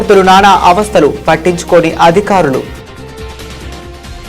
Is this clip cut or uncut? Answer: cut